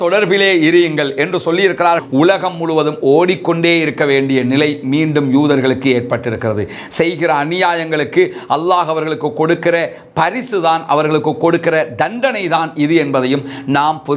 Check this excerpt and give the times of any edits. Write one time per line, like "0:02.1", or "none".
0:02.0